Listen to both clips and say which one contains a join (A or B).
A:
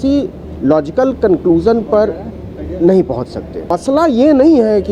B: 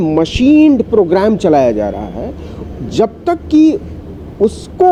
A